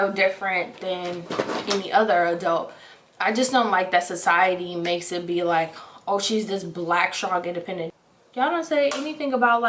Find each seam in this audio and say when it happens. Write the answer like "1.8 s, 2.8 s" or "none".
none